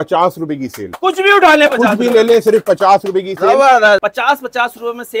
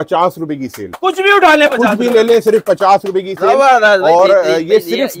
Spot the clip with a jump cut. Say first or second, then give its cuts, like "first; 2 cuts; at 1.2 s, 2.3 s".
first; 1 cut; at 4.0 s